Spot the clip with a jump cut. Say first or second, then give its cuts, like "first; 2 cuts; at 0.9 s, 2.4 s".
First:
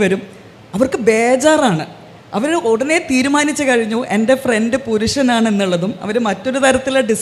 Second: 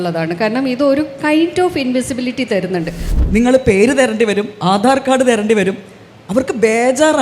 second; 1 cut; at 3.0 s